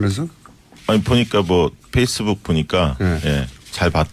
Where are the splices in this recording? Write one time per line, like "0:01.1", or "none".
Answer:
0:01.4